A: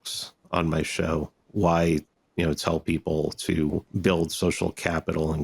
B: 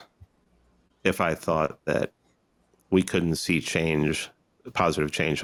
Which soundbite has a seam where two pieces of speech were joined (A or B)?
A